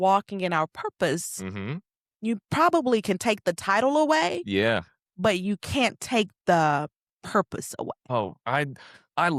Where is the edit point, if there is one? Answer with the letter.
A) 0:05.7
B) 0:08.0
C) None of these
B